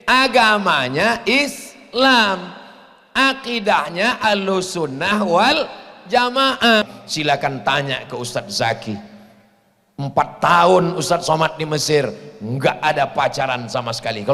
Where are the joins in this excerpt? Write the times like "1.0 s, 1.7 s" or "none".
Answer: 6.8 s